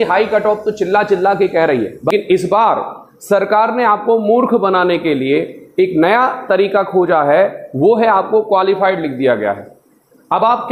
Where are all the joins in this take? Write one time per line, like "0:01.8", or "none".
0:02.1